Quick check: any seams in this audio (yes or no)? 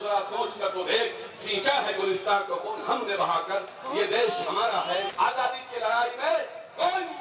yes